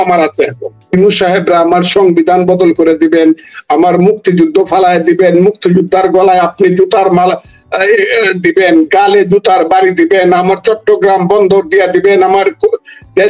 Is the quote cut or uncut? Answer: cut